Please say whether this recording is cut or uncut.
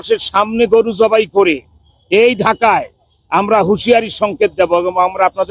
uncut